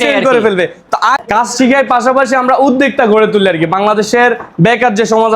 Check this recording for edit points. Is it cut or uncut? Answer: cut